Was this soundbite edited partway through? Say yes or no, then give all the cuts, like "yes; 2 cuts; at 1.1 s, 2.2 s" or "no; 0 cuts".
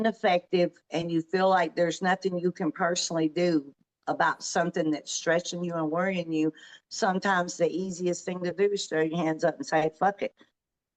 no; 0 cuts